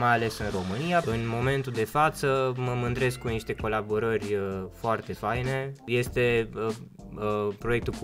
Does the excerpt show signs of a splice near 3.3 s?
no; 2 cuts; at 1.0 s, 5.8 s

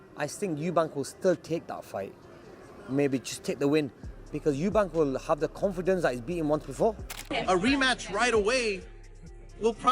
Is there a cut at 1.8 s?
no; 1 cut; at 7.3 s

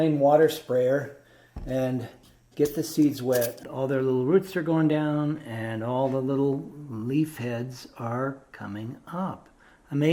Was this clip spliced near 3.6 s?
yes; 1 cut; at 3.6 s

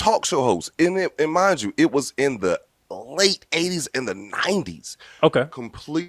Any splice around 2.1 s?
no; 0 cuts

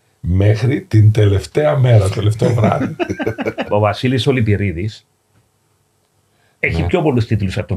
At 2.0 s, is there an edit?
no; 1 cut; at 3.7 s

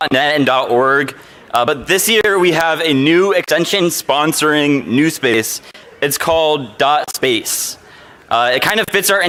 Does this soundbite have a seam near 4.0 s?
no; 0 cuts

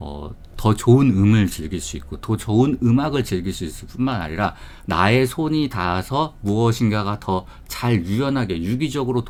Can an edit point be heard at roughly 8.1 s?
no; 0 cuts

